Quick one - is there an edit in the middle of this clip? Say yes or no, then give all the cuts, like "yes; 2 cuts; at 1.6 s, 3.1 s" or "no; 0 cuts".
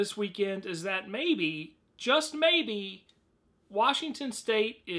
yes; 1 cut; at 1.6 s